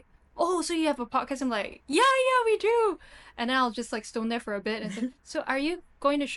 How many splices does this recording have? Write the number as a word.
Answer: zero